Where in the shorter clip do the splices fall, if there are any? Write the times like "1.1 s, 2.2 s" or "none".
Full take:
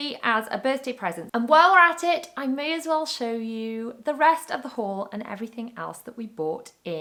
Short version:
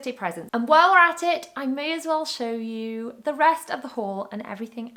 none